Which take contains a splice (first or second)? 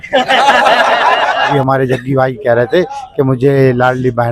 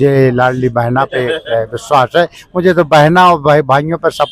first